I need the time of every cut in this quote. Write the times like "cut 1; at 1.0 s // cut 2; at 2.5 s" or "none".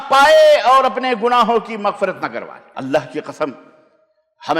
cut 1; at 2.6 s